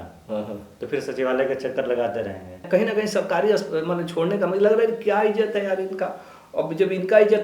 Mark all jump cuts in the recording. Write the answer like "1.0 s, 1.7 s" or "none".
2.6 s